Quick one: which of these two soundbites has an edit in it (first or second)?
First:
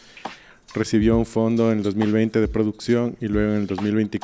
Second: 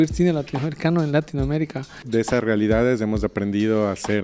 second